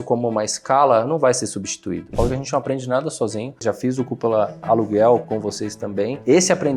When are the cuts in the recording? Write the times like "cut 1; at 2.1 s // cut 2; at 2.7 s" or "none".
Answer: cut 1; at 2.1 s // cut 2; at 3.6 s // cut 3; at 4.6 s // cut 4; at 5.2 s